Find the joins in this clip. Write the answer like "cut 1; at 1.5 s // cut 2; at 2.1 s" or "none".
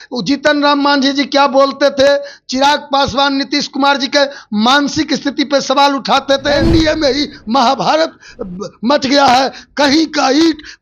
cut 1; at 6.6 s

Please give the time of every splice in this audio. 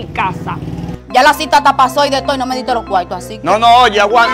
cut 1; at 0.9 s

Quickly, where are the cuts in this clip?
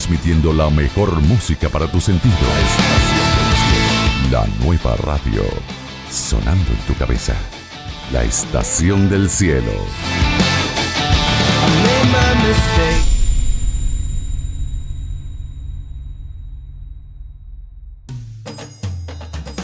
cut 1; at 18.0 s

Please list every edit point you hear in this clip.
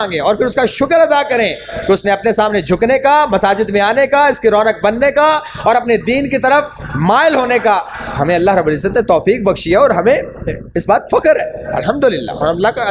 none

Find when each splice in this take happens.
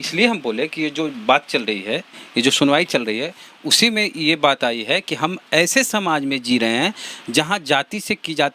none

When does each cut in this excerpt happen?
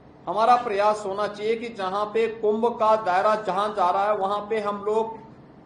none

